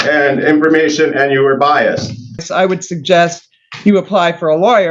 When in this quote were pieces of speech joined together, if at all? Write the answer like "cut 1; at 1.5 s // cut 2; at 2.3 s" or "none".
cut 1; at 2.4 s